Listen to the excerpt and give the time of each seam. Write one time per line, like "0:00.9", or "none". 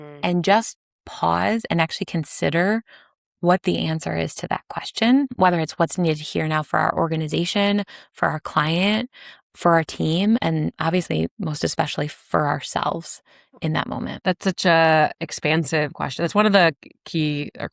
0:05.3
0:10.4
0:14.2